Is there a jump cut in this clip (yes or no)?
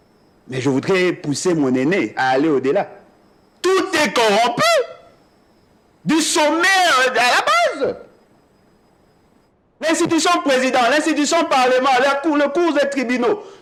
no